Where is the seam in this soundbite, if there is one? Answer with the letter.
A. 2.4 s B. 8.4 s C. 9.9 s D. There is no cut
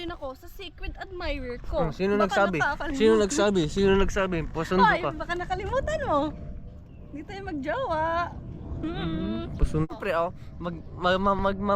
C